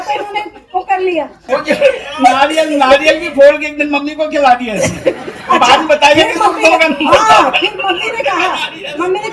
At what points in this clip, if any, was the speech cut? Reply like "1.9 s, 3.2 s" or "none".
1.4 s